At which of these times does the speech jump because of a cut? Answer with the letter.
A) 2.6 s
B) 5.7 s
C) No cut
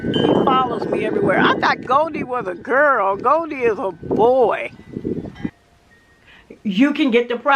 B